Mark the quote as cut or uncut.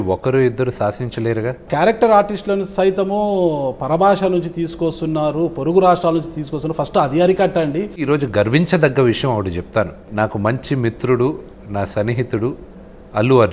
cut